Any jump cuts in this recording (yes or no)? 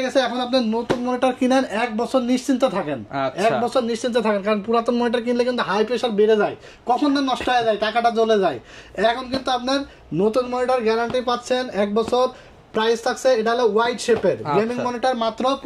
no